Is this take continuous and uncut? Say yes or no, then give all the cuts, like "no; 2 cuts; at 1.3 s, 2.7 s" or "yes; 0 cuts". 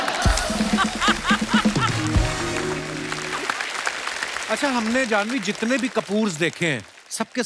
no; 2 cuts; at 3.2 s, 4.4 s